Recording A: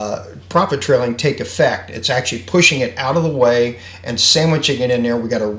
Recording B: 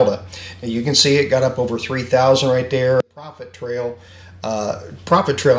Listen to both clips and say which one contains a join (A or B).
B